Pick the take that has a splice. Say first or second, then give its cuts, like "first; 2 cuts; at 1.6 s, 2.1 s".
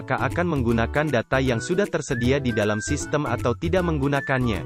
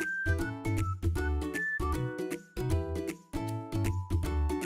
second; 2 cuts; at 1.3 s, 3.0 s